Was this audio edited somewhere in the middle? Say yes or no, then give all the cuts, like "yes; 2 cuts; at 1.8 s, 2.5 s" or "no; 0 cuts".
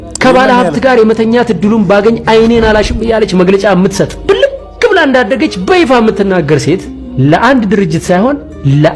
no; 0 cuts